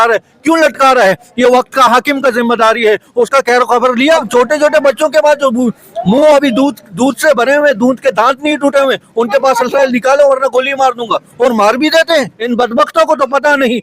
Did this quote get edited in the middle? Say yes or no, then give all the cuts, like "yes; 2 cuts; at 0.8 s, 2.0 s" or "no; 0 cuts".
yes; 2 cuts; at 4.3 s, 12.4 s